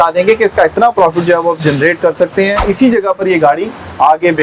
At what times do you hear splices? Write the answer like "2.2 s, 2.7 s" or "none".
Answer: 2.6 s